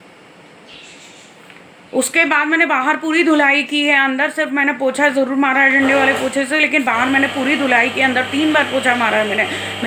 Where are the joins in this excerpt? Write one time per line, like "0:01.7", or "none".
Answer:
none